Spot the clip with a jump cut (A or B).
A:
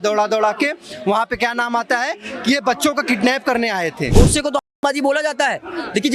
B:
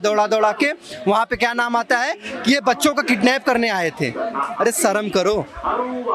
A